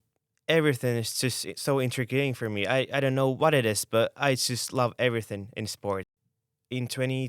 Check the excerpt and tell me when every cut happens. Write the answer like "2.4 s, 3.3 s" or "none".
6.1 s